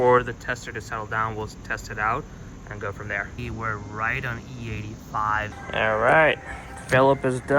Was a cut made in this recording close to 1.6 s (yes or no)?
no